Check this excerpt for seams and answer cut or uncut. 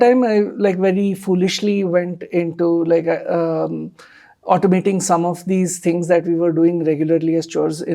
uncut